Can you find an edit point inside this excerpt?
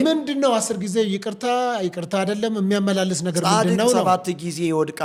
no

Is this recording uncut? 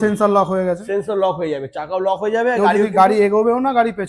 yes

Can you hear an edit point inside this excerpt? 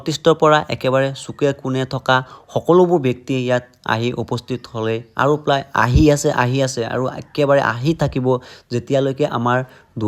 no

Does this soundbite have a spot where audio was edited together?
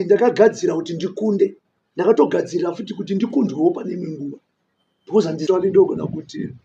yes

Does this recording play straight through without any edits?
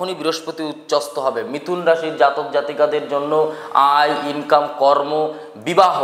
yes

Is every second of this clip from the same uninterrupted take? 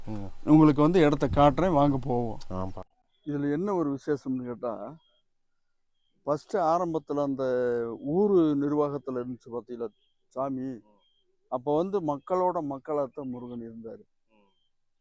yes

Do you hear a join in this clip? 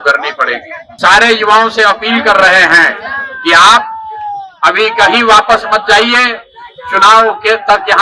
yes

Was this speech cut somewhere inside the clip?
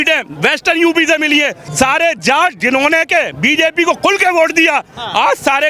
yes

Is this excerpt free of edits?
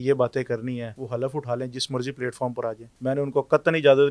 no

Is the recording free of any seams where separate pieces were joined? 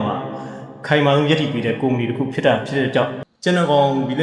no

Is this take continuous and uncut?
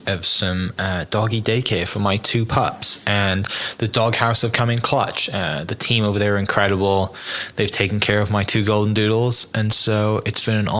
yes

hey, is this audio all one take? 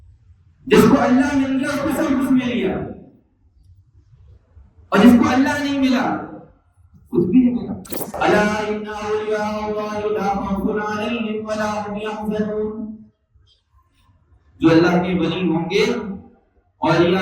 no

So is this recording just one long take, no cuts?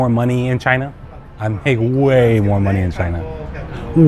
yes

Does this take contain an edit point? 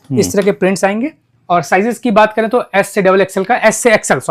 no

